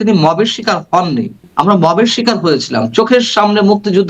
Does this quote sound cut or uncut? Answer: cut